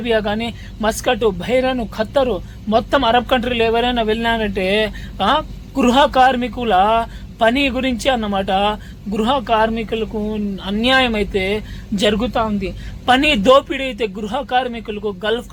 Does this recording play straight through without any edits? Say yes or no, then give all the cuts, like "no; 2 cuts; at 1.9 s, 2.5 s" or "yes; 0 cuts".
yes; 0 cuts